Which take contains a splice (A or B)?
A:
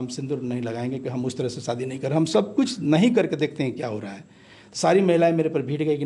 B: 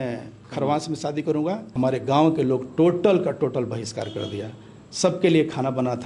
B